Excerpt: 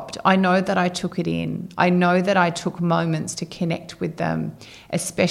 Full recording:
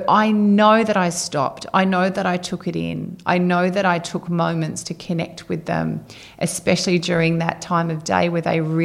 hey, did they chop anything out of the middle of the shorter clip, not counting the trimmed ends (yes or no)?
no